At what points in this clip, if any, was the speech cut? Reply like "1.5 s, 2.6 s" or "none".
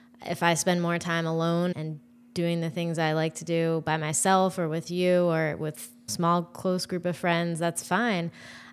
1.7 s, 6.1 s